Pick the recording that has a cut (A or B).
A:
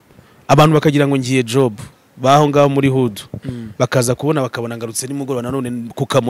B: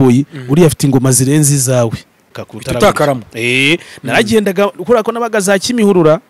B